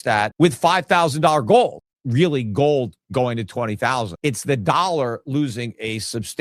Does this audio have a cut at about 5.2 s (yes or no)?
no